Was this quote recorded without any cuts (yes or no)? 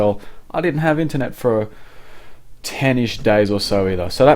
no